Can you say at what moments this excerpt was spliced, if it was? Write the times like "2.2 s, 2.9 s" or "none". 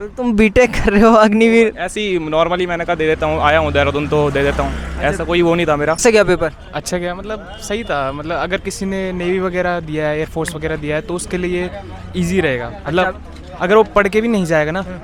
6.0 s